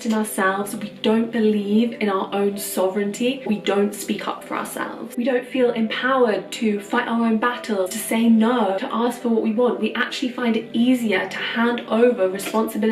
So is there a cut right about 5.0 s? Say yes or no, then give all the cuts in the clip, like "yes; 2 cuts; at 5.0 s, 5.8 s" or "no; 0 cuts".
yes; 4 cuts; at 3.4 s, 5.0 s, 8.0 s, 8.8 s